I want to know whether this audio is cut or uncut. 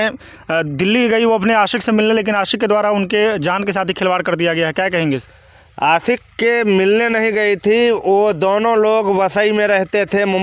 uncut